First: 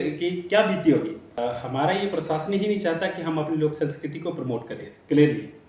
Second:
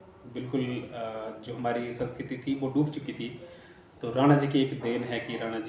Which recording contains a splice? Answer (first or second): first